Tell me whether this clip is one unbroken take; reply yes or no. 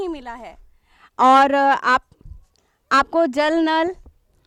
yes